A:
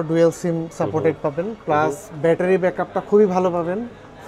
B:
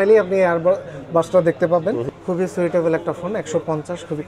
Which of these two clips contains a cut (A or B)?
B